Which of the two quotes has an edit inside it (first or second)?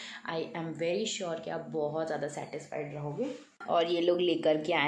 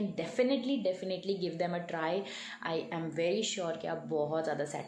first